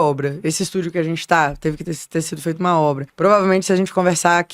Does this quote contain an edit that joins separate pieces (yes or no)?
yes